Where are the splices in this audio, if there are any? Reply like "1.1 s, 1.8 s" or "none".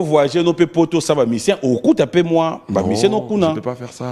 none